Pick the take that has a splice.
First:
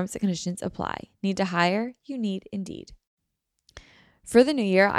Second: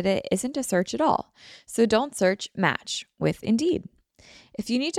first; 1 cut; at 3.0 s

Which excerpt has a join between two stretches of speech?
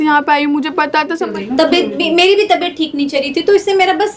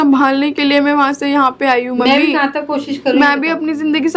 first; 1 cut; at 1.3 s

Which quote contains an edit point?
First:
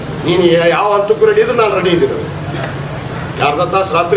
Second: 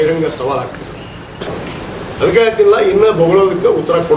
second; 1 cut; at 1.5 s

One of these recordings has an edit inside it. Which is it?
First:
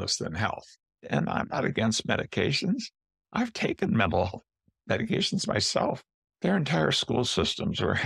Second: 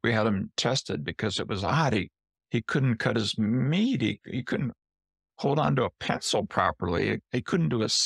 first; 2 cuts; at 1.1 s, 6.0 s

